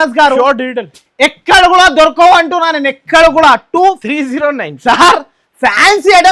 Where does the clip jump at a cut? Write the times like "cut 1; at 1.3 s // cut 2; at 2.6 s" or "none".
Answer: cut 1; at 4.0 s